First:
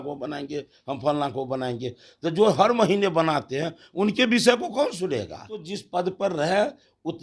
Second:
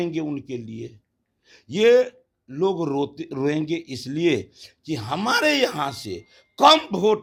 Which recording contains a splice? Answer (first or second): first